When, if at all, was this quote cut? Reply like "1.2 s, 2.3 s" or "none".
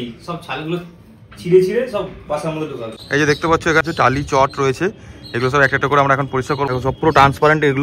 3.0 s, 3.8 s, 6.7 s